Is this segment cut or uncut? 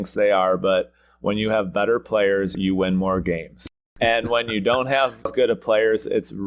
cut